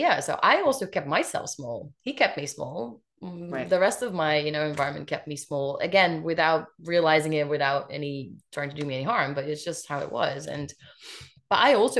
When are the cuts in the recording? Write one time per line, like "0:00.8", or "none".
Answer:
none